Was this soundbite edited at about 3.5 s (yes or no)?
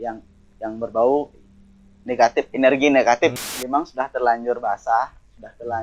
yes